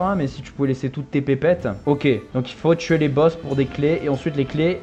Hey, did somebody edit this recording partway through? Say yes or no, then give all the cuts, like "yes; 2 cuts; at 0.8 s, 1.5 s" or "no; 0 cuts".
no; 0 cuts